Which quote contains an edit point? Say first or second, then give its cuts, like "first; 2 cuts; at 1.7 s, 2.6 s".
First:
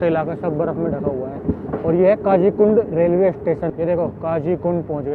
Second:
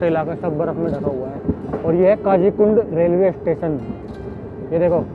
first; 1 cut; at 3.7 s